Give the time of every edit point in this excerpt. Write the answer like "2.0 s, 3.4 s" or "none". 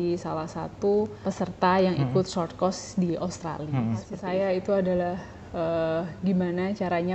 1.2 s, 4.1 s